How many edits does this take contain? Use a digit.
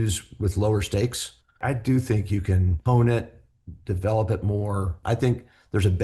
3